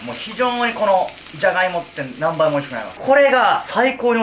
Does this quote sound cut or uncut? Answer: cut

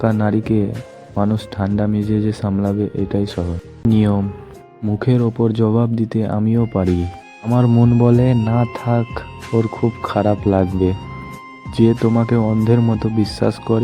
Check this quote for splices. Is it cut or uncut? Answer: cut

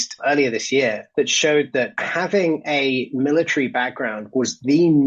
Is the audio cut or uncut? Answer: cut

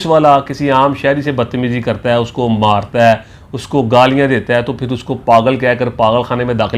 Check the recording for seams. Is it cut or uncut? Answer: uncut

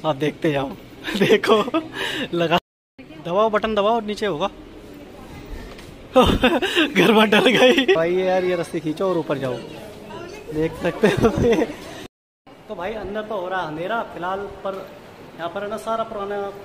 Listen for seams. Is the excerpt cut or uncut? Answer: cut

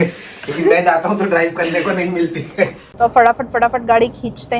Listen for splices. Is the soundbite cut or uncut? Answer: cut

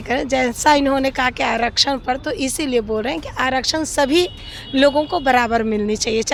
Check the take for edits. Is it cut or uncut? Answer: uncut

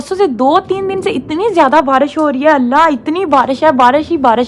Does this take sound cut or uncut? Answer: uncut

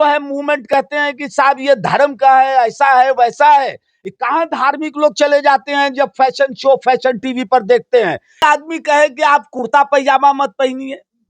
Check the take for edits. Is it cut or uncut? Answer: cut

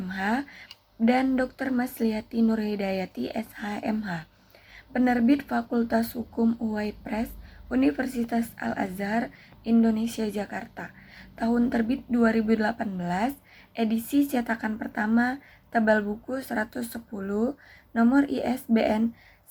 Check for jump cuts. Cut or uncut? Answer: uncut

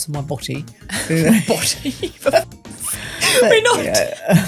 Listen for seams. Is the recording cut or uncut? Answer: uncut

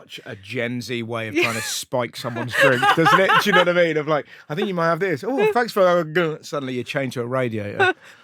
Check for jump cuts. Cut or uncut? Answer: uncut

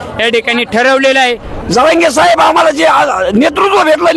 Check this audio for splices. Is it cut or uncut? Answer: cut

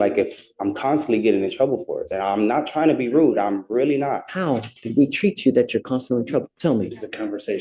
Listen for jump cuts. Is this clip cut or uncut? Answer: uncut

